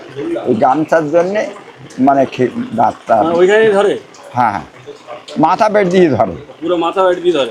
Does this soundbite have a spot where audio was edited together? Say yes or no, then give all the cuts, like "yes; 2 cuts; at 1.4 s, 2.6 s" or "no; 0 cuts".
no; 0 cuts